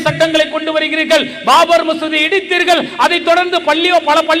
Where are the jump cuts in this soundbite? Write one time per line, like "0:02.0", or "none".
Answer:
none